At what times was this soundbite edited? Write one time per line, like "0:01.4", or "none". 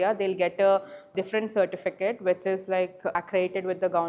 0:03.2